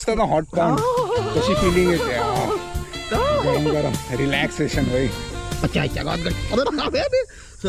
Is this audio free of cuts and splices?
yes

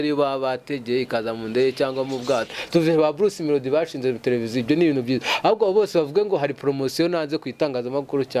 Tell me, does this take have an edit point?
yes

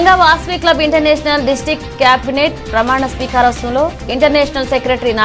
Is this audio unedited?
yes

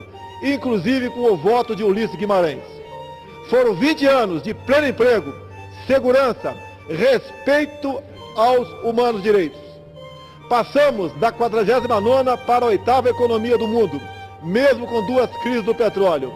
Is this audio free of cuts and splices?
no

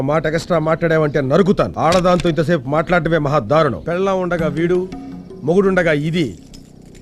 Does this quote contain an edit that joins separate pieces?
yes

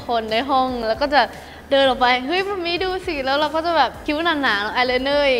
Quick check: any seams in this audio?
no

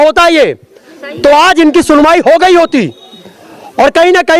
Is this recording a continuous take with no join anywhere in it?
yes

